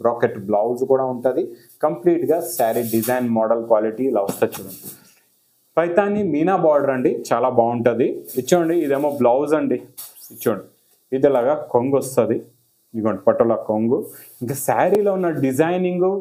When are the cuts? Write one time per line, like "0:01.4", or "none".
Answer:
0:08.2